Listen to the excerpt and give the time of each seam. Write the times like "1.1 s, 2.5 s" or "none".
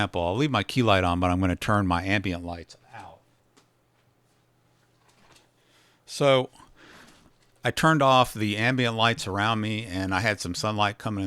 3.4 s